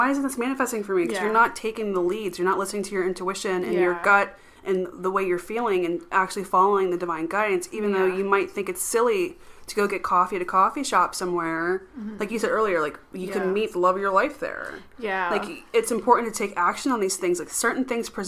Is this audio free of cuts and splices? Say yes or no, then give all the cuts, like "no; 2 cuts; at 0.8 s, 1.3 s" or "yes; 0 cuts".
yes; 0 cuts